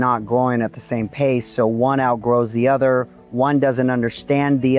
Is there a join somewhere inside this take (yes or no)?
no